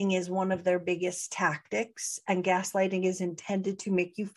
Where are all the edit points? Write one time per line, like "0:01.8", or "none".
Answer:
none